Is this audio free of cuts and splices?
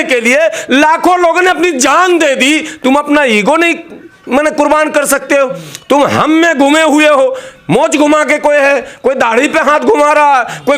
yes; 0 cuts

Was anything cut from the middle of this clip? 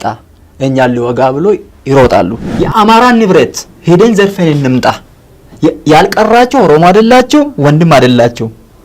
yes; 1 cut; at 2.4 s

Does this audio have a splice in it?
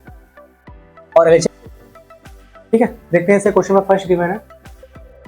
yes; 1 cut; at 1.4 s

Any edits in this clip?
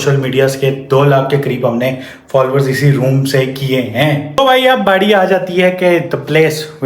yes; 1 cut; at 4.3 s

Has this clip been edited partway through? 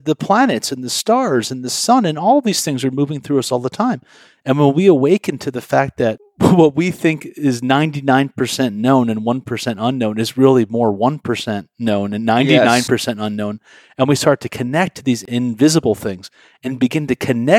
yes; 2 cuts; at 6.3 s, 15.2 s

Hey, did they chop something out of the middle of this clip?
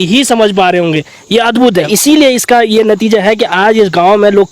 yes; 1 cut; at 1.9 s

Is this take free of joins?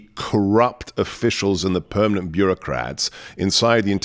yes; 0 cuts

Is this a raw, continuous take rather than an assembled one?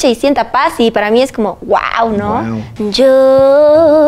no; 1 cut; at 2.6 s

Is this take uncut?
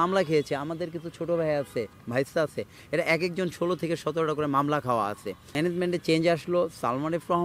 no; 1 cut; at 5.5 s

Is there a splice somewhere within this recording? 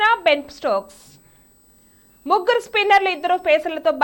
no; 0 cuts

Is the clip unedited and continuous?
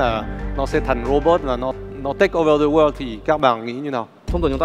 yes; 0 cuts

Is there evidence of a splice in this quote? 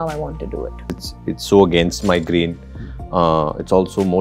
yes; 1 cut; at 0.9 s

